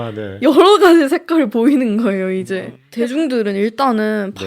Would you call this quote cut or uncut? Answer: cut